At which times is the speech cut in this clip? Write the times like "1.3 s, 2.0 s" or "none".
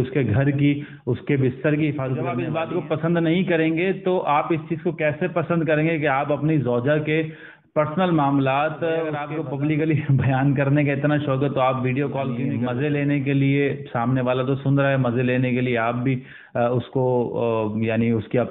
2.4 s, 9.3 s, 12.5 s